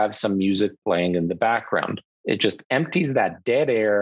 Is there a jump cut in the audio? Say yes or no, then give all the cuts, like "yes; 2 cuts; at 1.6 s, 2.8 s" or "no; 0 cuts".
yes; 1 cut; at 2.1 s